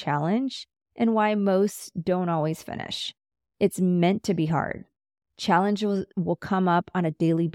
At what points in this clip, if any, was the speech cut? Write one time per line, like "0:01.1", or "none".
0:06.1